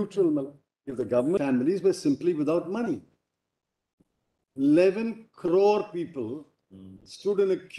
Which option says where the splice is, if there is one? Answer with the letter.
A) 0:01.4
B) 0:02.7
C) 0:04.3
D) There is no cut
A